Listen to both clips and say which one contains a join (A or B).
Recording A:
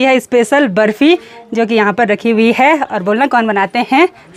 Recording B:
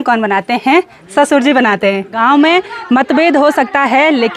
B